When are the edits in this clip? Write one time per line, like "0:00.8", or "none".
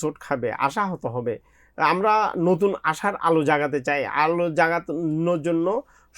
none